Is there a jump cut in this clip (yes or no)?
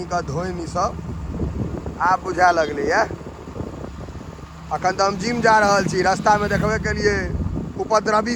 no